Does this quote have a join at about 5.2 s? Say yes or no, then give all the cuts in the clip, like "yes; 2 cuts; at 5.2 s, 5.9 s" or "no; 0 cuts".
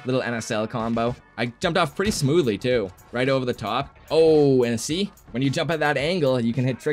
no; 2 cuts; at 1.2 s, 3.9 s